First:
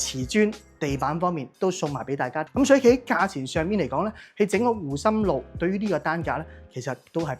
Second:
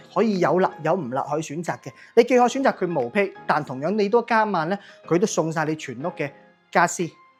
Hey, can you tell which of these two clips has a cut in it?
first; 1 cut; at 2.5 s

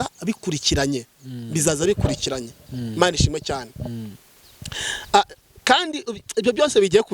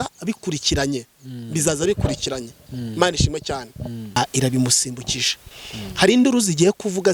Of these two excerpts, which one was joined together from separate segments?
second; 1 cut; at 4.2 s

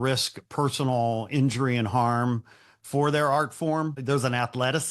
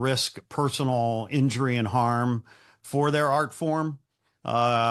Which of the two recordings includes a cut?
first; 1 cut; at 4.0 s

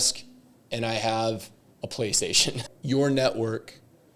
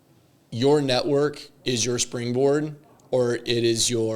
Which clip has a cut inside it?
first; 1 cut; at 2.6 s

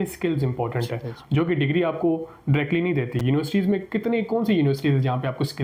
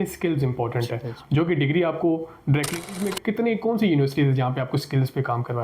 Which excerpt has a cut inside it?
second; 1 cut; at 2.8 s

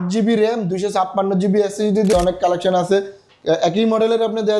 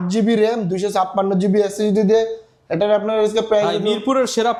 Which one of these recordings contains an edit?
first; 1 cut; at 2.1 s

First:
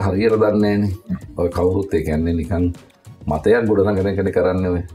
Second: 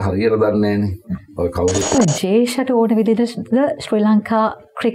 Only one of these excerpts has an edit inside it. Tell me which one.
second; 1 cut; at 1.9 s

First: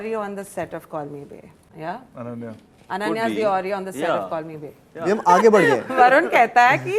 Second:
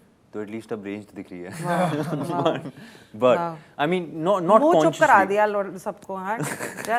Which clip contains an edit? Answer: first; 2 cuts; at 1.7 s, 5.1 s

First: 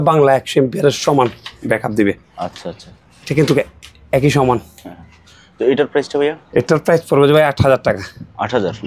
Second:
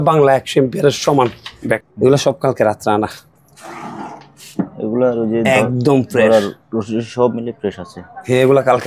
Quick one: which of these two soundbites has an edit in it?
second; 1 cut; at 1.9 s

